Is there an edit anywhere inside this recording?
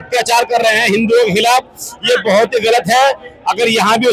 no; 0 cuts

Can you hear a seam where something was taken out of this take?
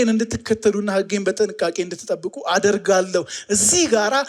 no; 0 cuts

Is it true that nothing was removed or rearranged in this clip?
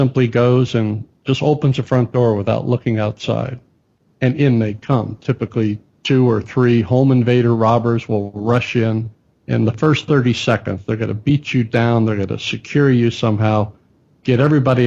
yes; 0 cuts

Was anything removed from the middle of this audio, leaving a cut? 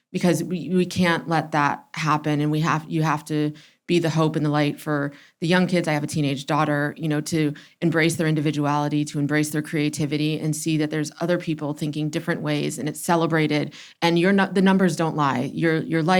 no; 0 cuts

